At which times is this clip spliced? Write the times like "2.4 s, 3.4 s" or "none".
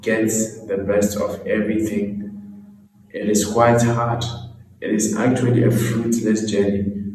none